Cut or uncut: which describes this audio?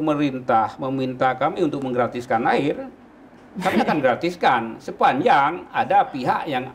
uncut